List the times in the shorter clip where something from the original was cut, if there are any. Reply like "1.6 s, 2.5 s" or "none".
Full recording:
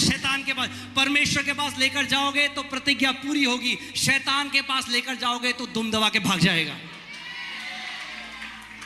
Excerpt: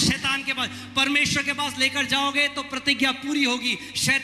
none